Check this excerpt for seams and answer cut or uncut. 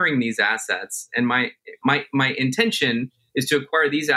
cut